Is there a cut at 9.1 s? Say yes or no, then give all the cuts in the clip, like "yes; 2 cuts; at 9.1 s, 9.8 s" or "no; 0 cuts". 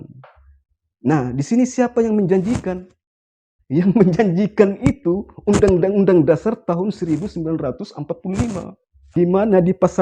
yes; 1 cut; at 9.1 s